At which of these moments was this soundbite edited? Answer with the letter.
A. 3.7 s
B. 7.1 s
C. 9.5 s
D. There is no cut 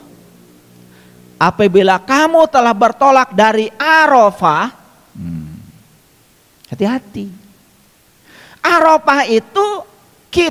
D